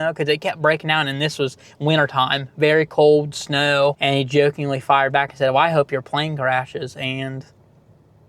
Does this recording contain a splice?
yes; 1 cut; at 4.0 s

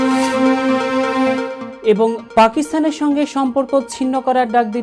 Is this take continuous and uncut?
no; 1 cut; at 1.6 s

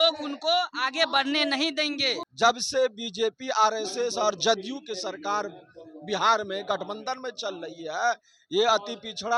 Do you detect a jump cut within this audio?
yes; 1 cut; at 2.2 s

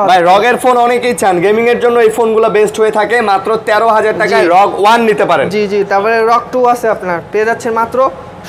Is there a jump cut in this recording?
no; 0 cuts

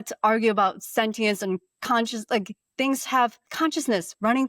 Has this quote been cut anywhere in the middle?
yes; 1 cut; at 3.4 s

